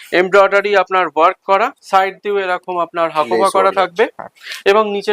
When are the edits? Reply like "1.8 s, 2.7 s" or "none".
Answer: none